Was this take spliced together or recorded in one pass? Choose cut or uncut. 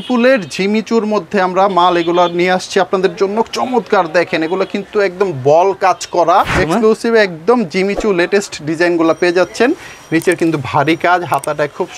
cut